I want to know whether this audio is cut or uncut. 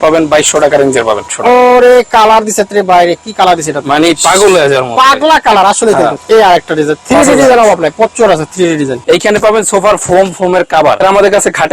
cut